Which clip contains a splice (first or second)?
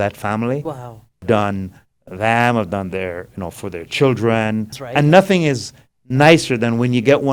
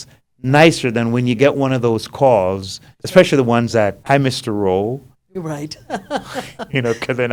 first